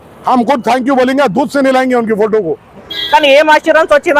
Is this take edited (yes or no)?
yes